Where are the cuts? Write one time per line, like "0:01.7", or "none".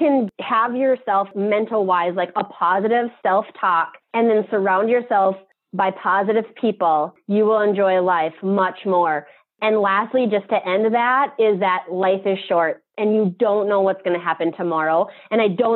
0:01.3